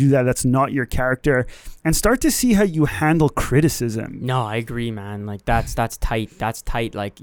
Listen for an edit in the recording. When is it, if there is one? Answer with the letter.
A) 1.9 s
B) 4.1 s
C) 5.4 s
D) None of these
B